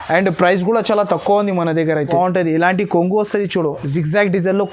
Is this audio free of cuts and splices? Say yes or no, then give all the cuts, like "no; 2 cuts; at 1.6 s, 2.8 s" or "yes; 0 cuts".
no; 1 cut; at 2.1 s